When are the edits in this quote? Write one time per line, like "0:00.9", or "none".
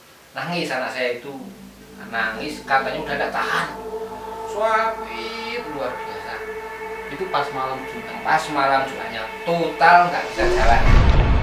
0:10.5